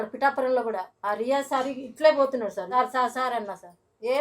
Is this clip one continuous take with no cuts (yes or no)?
no